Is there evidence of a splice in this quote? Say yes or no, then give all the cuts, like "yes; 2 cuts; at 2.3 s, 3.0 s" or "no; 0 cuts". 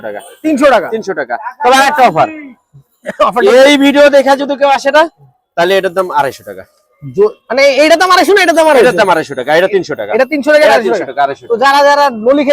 no; 0 cuts